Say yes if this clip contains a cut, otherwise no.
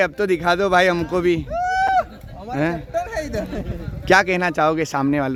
no